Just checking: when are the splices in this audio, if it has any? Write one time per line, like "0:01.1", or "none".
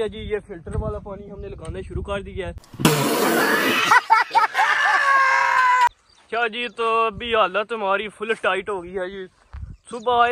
0:06.1